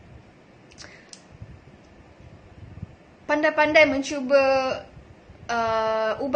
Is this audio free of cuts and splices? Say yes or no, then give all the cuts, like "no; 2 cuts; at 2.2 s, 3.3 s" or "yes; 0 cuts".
yes; 0 cuts